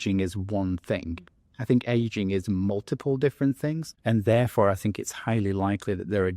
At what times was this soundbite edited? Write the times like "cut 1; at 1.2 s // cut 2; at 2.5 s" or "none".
cut 1; at 3.9 s